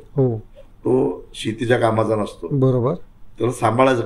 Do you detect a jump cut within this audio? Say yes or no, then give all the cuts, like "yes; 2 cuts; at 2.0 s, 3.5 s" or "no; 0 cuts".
no; 0 cuts